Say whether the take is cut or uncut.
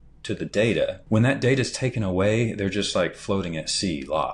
cut